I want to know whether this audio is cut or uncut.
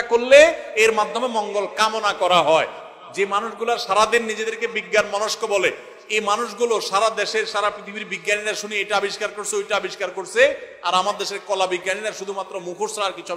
uncut